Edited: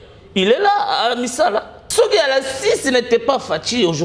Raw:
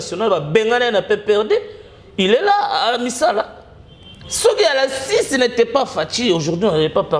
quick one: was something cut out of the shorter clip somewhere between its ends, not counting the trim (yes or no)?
yes